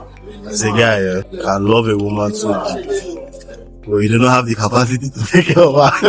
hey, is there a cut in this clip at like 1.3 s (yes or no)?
yes